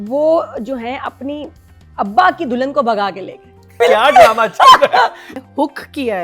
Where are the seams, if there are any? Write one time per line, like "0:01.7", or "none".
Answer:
0:03.7
0:05.3